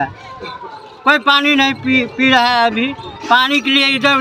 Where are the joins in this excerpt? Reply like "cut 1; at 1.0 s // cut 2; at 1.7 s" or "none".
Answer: none